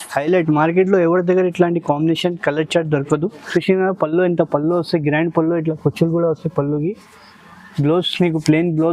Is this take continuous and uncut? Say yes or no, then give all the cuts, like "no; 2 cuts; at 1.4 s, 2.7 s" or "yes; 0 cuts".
no; 1 cut; at 3.4 s